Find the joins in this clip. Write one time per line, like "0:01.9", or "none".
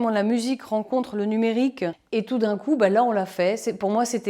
0:02.0